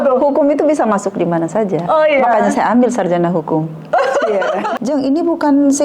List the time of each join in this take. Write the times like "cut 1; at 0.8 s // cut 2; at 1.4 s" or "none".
cut 1; at 4.7 s